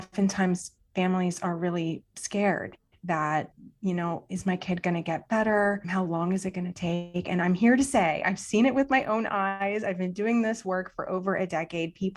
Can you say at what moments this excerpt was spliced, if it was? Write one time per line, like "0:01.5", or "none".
none